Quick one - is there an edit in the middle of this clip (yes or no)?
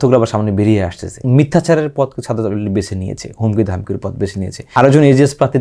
yes